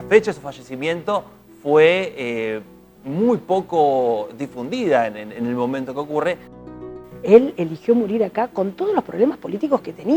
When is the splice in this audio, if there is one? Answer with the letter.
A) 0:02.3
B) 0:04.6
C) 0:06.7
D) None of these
C